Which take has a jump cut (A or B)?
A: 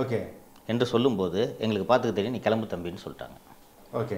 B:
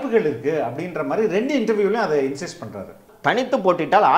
B